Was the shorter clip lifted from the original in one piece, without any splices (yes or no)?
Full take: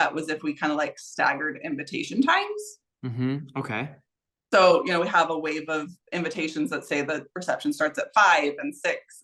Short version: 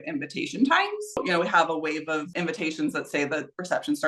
no